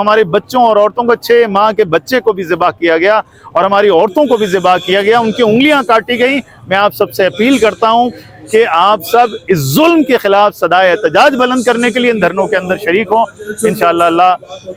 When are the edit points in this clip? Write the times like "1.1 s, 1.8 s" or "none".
none